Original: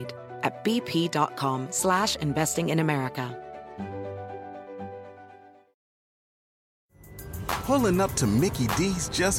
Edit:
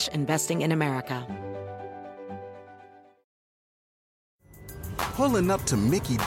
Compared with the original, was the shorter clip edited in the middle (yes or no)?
yes